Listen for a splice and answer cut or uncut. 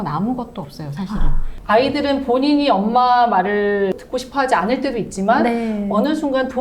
cut